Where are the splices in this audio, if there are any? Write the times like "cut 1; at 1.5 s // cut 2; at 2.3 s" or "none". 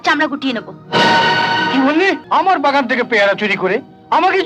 cut 1; at 2.2 s